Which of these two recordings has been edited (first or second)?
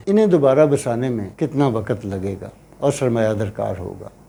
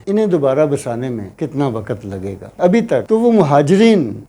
second